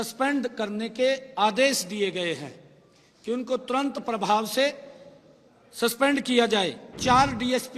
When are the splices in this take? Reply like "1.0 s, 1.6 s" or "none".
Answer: 6.9 s